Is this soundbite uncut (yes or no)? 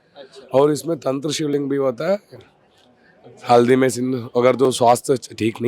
yes